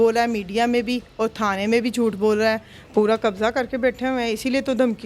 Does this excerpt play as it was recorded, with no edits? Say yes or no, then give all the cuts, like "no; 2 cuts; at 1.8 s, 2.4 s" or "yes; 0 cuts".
no; 1 cut; at 2.7 s